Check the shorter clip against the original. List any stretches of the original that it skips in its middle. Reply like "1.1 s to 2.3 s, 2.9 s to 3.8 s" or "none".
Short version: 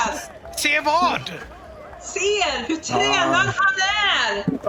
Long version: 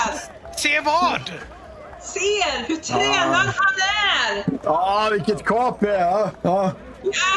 none